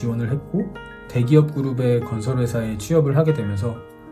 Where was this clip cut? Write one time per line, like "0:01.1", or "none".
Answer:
none